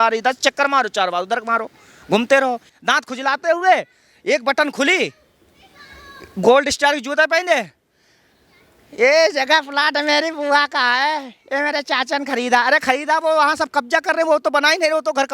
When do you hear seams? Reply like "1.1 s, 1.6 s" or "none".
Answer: 2.6 s